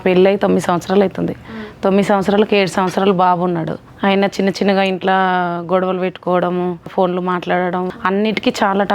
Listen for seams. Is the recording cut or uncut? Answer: cut